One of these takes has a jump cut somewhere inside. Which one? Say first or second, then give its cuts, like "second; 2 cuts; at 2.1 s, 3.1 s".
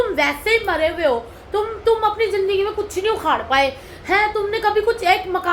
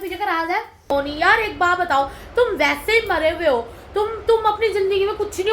second; 1 cut; at 0.9 s